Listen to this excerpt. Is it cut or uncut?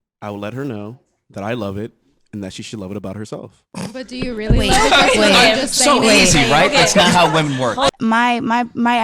cut